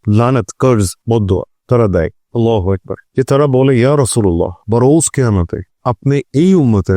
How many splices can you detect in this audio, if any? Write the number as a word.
two